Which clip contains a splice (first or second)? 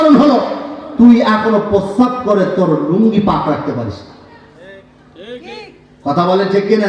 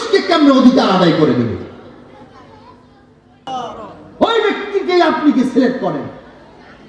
second